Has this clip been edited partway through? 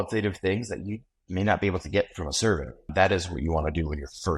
yes; 1 cut; at 2.9 s

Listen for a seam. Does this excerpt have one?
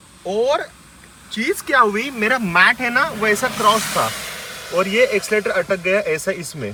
no; 0 cuts

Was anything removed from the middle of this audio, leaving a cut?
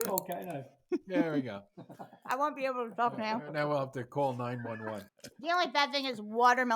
yes; 1 cut; at 5.2 s

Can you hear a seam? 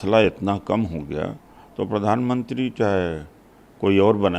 no; 0 cuts

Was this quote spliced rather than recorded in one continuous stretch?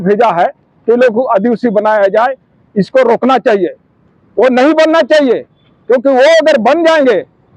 no; 0 cuts

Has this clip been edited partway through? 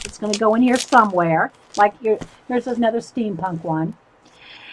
yes; 1 cut; at 1.0 s

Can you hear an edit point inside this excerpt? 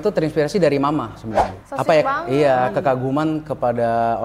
yes; 1 cut; at 1.6 s

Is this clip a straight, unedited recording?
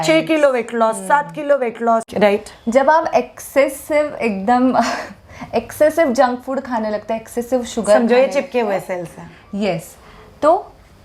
no; 1 cut; at 2.1 s

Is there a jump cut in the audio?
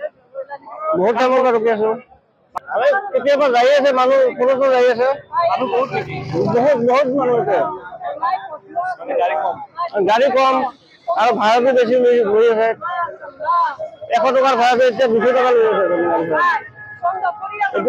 yes; 1 cut; at 2.5 s

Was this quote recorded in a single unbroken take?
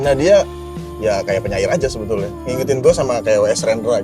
no; 1 cut; at 2.4 s

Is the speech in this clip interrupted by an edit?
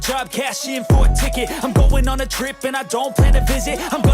yes; 1 cut; at 2.1 s

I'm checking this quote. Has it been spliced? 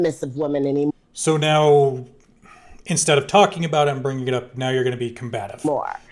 no; 0 cuts

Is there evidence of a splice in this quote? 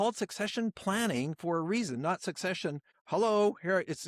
yes; 1 cut; at 2.9 s

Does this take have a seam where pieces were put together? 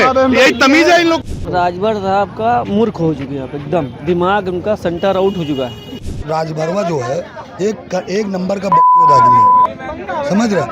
yes; 2 cuts; at 1.3 s, 6.1 s

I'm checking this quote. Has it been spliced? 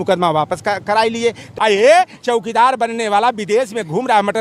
yes; 1 cut; at 1.5 s

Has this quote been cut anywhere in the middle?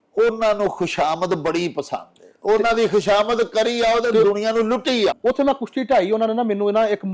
yes; 1 cut; at 5.2 s

